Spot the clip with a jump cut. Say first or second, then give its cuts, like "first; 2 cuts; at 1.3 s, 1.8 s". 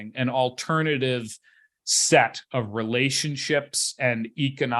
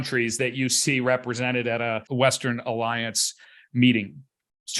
second; 1 cut; at 2.0 s